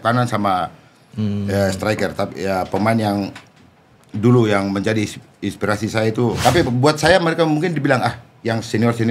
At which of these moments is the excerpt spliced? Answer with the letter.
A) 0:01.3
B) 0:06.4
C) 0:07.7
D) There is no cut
B